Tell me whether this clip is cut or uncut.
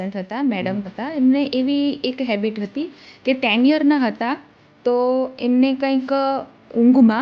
uncut